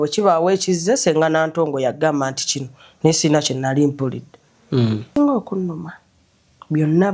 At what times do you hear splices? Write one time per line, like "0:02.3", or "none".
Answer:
0:05.2